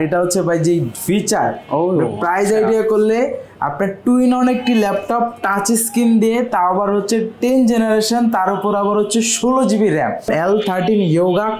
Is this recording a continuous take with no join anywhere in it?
no; 1 cut; at 10.3 s

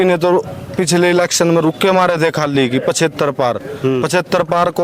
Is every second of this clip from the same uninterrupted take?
yes; 0 cuts

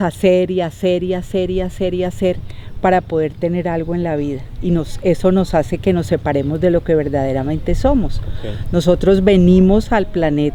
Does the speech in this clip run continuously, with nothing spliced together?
yes; 0 cuts

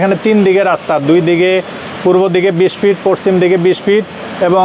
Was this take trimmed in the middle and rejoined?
no; 0 cuts

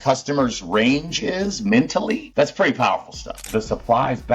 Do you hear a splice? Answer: yes; 2 cuts; at 2.2 s, 3.5 s

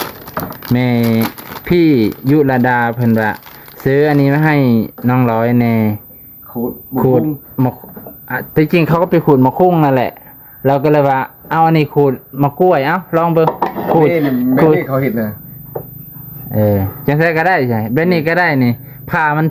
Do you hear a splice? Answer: no; 0 cuts

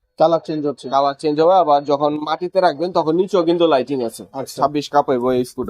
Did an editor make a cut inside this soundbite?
yes; 1 cut; at 4.5 s

